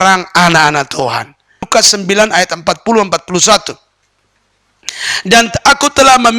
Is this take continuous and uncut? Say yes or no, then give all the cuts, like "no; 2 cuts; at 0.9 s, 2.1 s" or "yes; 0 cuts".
no; 1 cut; at 1.7 s